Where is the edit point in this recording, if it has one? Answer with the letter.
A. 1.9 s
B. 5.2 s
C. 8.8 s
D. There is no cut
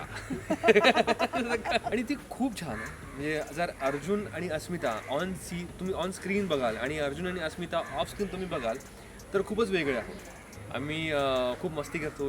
A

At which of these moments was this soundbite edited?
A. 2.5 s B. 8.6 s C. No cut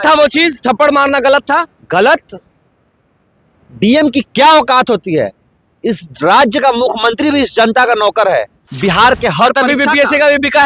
B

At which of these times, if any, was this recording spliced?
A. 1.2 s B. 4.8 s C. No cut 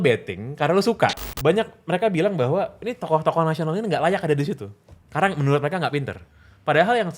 A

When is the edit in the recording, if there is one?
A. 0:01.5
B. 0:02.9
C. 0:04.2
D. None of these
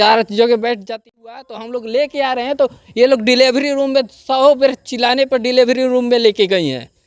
A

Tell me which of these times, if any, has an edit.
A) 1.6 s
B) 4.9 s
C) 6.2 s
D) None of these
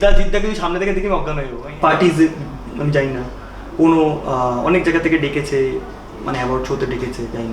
A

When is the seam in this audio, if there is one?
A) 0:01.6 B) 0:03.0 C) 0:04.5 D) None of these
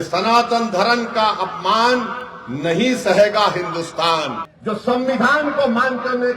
C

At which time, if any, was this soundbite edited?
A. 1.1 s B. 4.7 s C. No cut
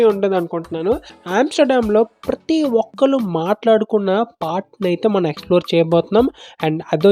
A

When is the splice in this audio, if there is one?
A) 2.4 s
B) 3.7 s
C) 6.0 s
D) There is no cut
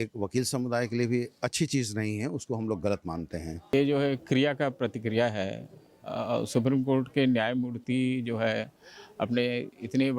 B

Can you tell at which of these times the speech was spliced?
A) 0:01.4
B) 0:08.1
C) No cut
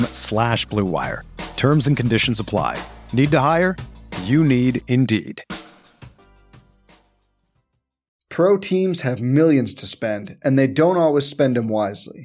B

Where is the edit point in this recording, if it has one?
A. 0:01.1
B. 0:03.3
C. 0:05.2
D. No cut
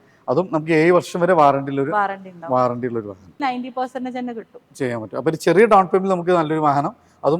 B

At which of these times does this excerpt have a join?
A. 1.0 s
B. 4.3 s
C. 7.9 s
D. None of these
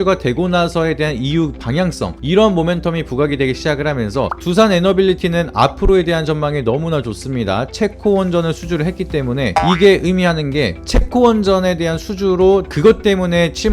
B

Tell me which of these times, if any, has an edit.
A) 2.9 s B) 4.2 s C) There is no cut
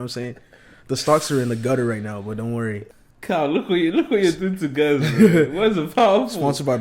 A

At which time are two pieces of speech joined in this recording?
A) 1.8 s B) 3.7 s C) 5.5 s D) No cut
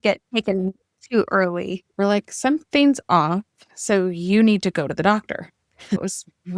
A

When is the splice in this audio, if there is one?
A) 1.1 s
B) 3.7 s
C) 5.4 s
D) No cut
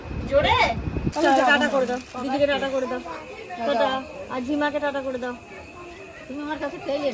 A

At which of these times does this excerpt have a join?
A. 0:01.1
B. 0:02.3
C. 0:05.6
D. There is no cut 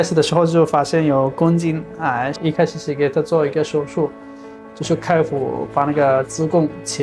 B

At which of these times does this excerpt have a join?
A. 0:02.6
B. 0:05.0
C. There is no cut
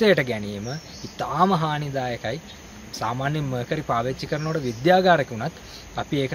A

